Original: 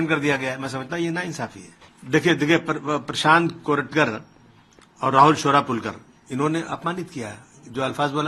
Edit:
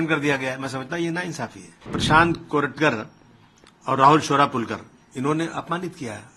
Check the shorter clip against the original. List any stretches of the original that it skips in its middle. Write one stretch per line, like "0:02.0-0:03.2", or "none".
0:02.0-0:03.1